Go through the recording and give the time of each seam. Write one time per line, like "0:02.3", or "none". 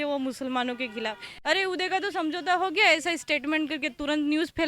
0:01.3